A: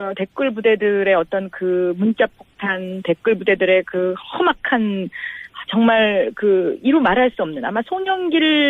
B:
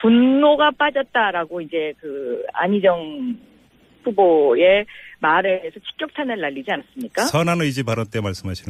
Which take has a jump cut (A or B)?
A